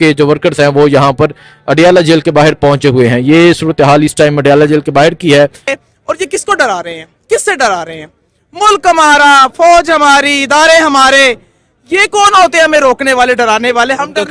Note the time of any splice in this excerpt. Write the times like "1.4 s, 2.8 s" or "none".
5.7 s